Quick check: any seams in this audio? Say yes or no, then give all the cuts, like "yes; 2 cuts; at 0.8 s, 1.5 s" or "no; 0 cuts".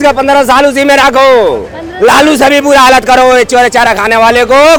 no; 0 cuts